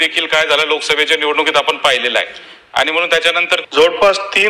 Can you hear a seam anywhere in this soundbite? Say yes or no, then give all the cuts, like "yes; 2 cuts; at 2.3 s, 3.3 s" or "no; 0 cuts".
yes; 1 cut; at 3.6 s